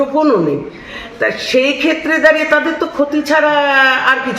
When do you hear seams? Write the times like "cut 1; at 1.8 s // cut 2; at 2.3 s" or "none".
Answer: none